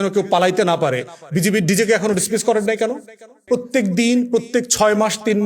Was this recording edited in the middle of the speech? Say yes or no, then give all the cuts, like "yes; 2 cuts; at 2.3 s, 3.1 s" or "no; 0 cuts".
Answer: yes; 1 cut; at 3.3 s